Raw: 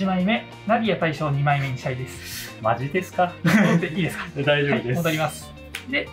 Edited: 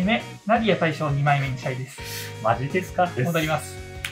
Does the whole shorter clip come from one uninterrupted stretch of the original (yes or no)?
no